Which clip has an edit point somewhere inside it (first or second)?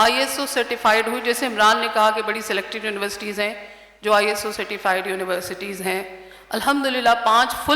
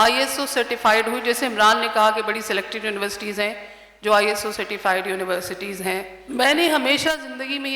second